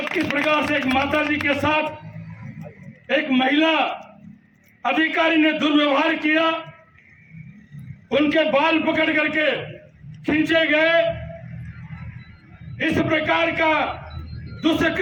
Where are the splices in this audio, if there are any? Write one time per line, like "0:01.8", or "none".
none